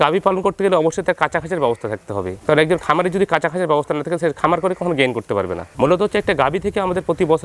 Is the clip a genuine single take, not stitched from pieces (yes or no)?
no